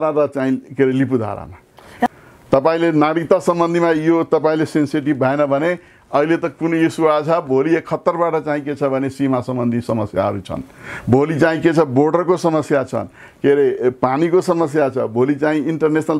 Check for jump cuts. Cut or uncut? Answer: cut